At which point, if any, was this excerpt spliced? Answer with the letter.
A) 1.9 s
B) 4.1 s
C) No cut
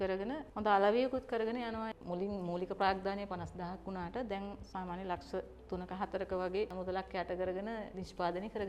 A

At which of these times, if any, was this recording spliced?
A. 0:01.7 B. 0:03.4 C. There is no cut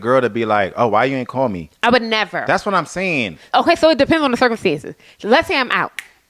B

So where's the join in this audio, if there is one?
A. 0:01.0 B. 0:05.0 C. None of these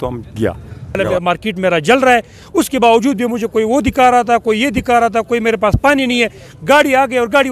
A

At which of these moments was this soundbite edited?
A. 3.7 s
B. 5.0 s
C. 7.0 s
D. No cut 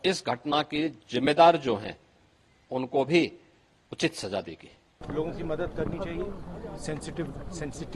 B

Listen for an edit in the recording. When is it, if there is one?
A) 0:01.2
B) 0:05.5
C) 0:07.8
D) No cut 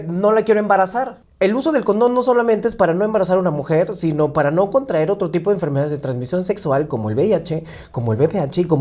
A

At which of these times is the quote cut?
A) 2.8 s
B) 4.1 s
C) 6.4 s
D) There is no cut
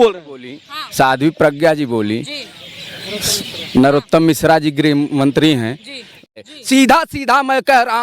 C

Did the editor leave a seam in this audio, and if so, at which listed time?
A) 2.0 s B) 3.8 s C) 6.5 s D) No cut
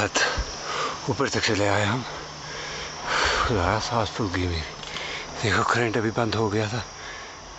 D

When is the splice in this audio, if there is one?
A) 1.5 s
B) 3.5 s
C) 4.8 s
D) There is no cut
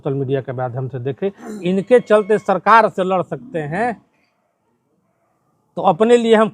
A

